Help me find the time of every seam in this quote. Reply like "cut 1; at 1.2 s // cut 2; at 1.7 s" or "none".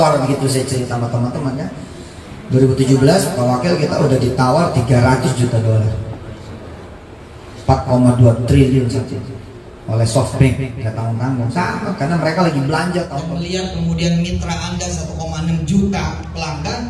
cut 1; at 13.2 s